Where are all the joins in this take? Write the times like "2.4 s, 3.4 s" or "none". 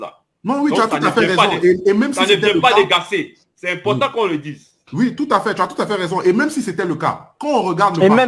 none

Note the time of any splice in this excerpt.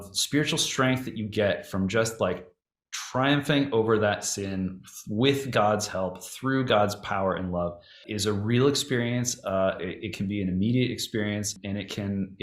8.1 s, 11.6 s

